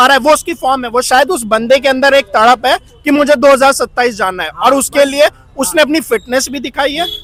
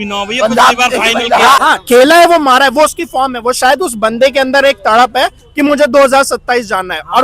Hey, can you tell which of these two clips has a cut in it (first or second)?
second